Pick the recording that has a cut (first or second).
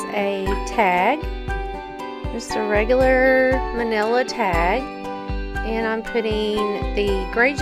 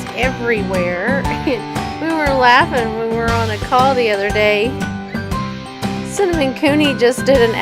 second